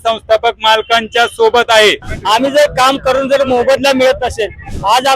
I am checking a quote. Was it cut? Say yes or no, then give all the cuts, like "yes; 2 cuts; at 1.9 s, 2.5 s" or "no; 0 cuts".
yes; 1 cut; at 2.0 s